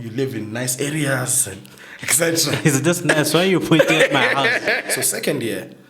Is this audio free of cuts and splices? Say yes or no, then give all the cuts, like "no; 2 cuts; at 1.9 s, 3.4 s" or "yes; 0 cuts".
no; 1 cut; at 4.8 s